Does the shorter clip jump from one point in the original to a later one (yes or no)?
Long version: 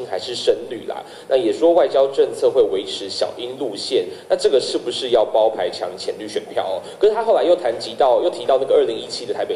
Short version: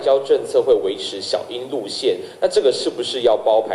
no